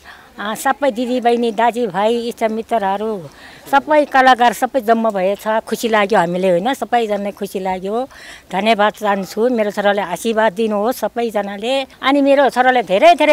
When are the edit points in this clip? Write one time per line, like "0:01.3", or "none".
0:11.9